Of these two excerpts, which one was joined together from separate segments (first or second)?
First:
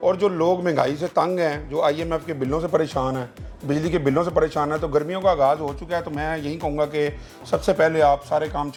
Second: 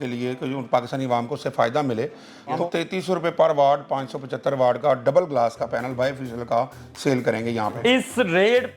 second